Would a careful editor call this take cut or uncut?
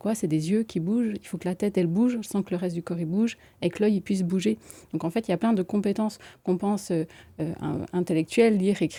uncut